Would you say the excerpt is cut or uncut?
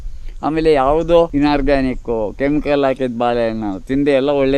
cut